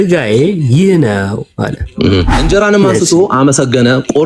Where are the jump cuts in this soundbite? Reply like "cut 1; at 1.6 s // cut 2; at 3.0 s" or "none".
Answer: cut 1; at 2.4 s

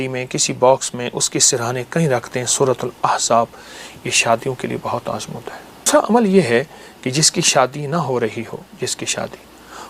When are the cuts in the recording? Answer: cut 1; at 5.9 s

